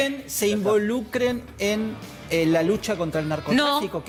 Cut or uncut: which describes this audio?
uncut